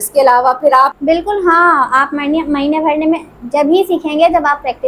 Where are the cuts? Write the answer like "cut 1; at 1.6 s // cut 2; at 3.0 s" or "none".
cut 1; at 0.9 s